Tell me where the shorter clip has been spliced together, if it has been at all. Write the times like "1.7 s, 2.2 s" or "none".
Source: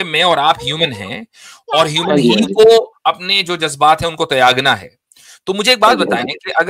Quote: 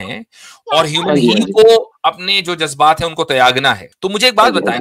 3.9 s